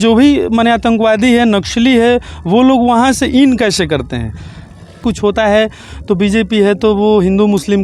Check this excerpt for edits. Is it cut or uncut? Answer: cut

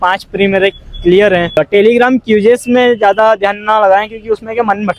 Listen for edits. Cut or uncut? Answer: cut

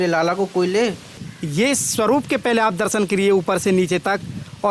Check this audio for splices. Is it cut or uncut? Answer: cut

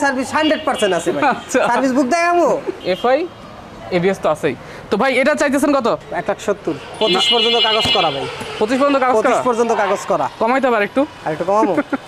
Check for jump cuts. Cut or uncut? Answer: cut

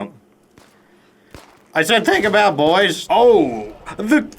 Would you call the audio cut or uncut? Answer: cut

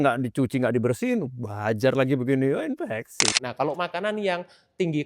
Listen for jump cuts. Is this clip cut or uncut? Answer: cut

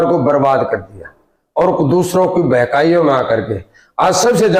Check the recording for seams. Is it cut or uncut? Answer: uncut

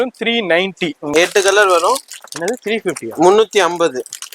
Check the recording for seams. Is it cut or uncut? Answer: cut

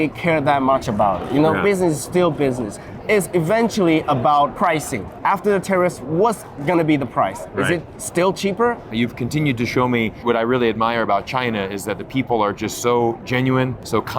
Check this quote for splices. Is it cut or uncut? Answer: cut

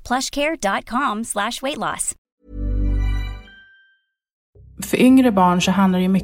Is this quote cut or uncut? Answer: cut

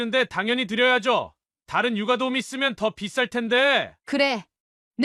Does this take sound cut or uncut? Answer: uncut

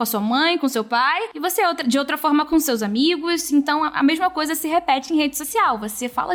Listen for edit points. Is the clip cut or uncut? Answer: uncut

